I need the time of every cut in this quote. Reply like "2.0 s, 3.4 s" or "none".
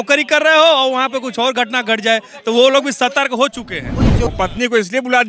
4.3 s

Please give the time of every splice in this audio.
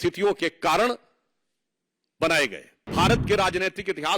2.9 s

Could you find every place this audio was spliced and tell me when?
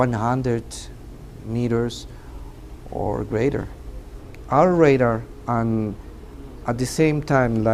none

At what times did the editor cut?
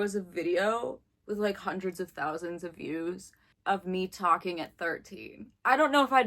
3.5 s

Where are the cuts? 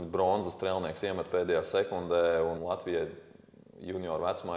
2.6 s

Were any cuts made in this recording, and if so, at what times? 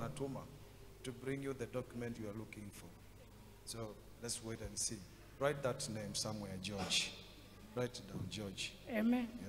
5.9 s

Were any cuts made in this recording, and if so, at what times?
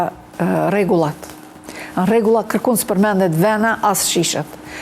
none

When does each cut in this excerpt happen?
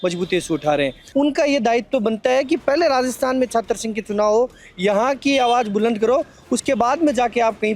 1.0 s

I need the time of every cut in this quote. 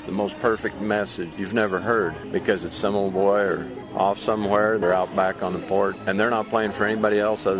1.3 s, 2.2 s, 3.8 s, 4.8 s, 6.0 s

